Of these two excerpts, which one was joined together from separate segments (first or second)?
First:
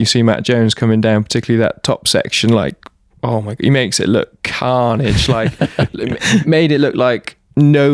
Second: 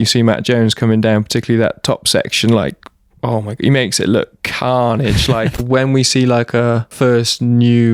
second